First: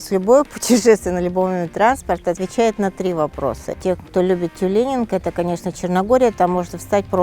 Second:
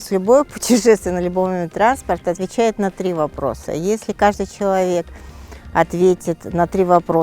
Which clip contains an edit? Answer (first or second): first